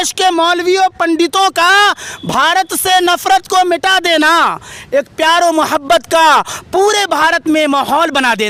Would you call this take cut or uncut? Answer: uncut